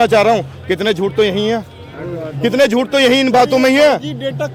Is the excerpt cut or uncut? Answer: uncut